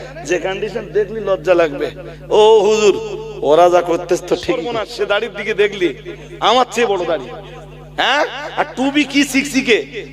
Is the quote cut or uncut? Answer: cut